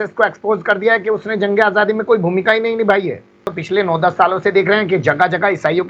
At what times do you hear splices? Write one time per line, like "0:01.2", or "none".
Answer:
0:03.5